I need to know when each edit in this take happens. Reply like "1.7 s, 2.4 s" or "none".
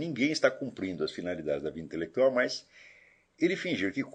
none